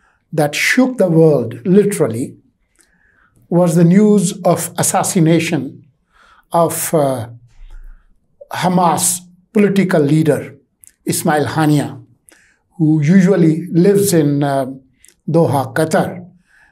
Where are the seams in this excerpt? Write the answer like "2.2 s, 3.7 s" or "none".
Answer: none